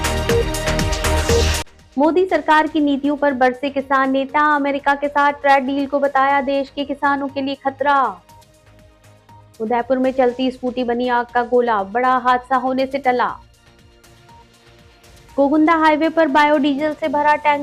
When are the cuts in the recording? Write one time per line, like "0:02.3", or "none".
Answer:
0:01.4